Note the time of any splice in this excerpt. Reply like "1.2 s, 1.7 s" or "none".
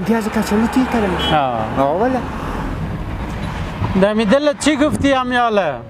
2.4 s